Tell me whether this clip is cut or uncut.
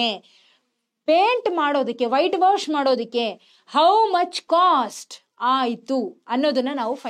uncut